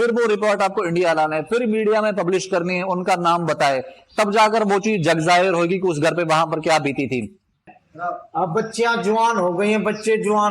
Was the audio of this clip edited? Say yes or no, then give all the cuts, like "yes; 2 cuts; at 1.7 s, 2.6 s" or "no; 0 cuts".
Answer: yes; 1 cut; at 7.6 s